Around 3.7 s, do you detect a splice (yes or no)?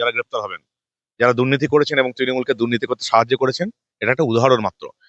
no